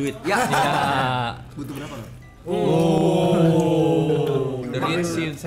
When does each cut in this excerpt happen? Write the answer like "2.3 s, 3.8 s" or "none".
none